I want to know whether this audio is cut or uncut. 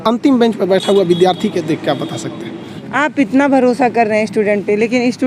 uncut